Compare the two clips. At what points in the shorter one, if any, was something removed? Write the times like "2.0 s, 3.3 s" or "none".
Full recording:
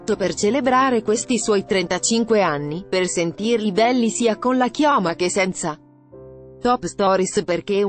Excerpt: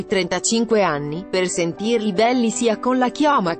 none